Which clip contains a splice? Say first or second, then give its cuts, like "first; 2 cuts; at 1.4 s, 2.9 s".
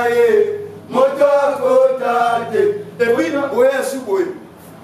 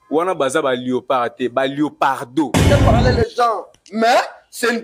second; 1 cut; at 2.6 s